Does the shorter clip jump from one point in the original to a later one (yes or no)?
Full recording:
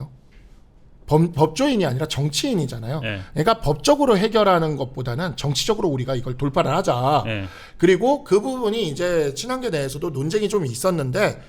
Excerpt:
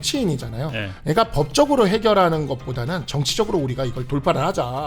no